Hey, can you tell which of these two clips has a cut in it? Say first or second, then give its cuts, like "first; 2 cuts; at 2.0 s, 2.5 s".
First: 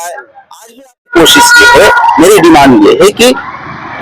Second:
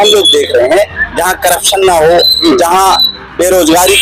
first; 1 cut; at 1.1 s